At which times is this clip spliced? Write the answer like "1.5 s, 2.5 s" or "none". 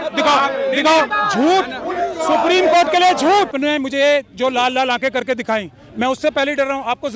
1.1 s, 3.5 s